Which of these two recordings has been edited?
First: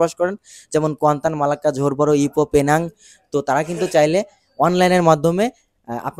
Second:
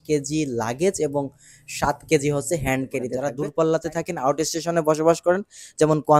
second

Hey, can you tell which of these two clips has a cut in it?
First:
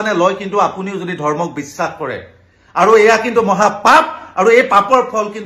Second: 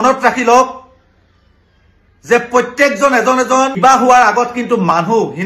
second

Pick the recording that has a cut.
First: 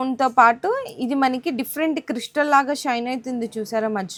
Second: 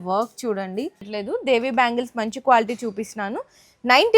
second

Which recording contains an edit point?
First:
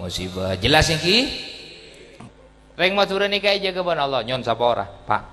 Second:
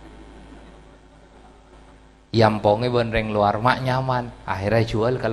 first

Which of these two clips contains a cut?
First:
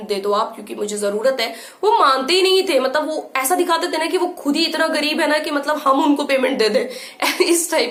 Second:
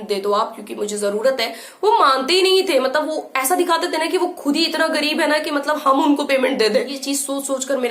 second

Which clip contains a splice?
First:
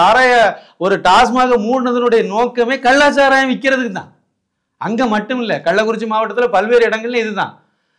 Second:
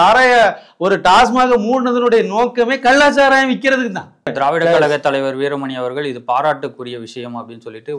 second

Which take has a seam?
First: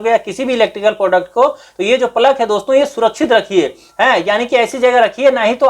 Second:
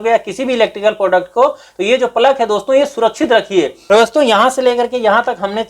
second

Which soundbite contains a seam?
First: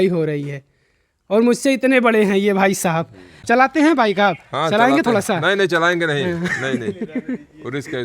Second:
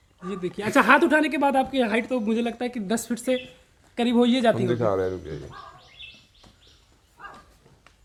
first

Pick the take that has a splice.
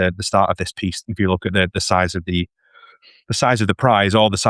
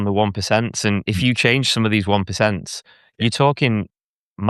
first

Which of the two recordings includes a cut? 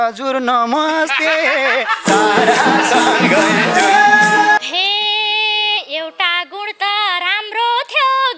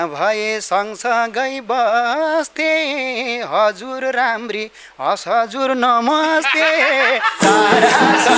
first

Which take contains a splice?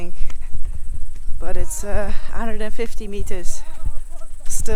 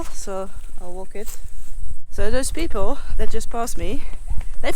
second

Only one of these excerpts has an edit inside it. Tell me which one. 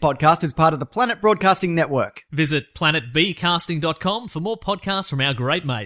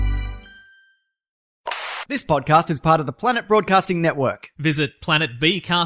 second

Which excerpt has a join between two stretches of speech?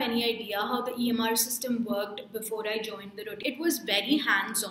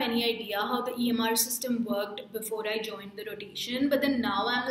first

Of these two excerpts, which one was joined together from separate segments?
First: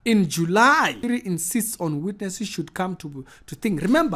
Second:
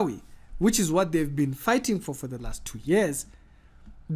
first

